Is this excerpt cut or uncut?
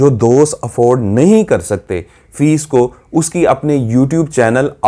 uncut